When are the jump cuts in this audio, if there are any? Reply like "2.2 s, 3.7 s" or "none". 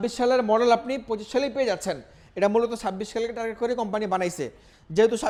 none